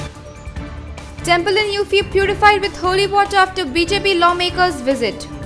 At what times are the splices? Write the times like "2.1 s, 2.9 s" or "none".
none